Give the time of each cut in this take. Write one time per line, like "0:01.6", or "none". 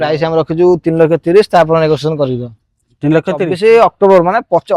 0:03.5

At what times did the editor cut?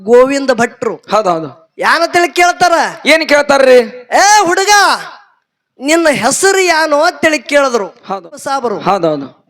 0:08.3

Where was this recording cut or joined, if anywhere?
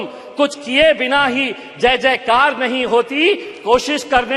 none

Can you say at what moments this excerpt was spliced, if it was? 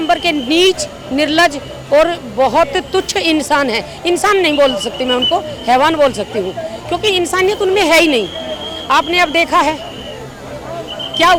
none

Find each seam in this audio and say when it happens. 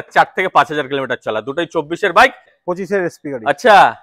0:02.5

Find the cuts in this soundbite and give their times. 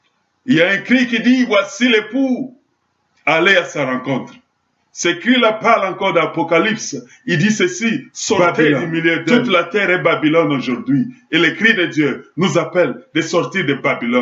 0:09.3

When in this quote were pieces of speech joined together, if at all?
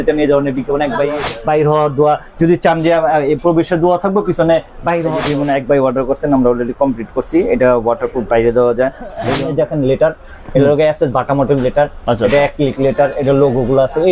0:01.3
0:05.2
0:09.2

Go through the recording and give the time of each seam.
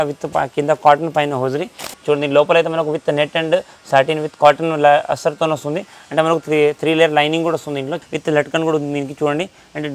0:01.8
0:07.9

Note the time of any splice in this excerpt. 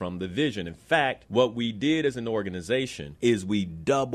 0:01.2
0:03.0

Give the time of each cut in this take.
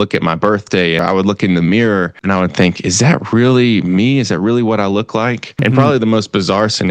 0:01.0
0:02.1
0:05.6

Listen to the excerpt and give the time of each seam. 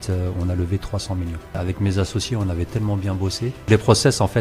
0:01.6
0:03.6

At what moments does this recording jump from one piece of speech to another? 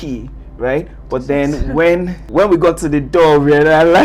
0:02.2

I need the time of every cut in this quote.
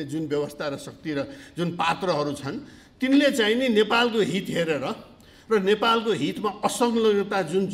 none

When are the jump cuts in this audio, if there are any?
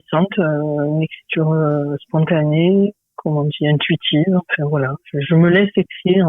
0:03.1

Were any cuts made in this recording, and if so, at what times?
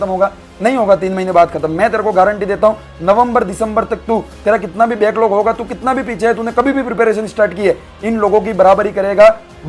none

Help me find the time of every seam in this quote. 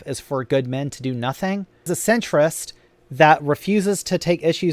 0:01.9

